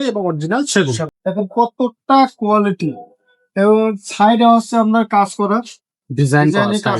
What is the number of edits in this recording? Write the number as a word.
one